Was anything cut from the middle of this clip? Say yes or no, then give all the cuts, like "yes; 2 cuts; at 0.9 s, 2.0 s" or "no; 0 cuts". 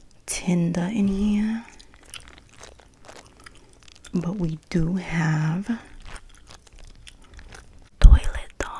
yes; 1 cut; at 7.9 s